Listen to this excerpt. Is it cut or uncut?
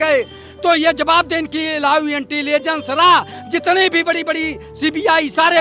uncut